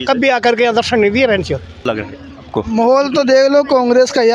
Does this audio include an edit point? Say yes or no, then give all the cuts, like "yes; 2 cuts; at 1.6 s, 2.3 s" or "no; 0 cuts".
yes; 1 cut; at 1.7 s